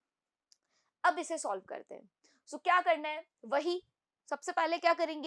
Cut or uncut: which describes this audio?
uncut